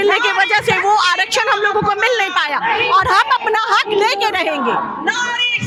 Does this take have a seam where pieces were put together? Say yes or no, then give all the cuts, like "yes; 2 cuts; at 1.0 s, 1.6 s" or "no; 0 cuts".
no; 0 cuts